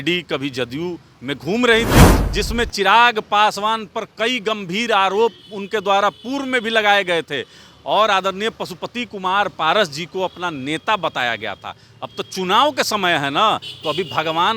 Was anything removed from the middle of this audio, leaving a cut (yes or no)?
yes